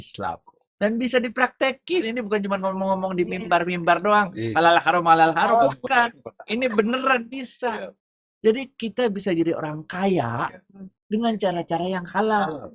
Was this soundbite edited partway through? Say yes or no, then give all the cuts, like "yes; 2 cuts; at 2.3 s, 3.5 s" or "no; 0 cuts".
no; 0 cuts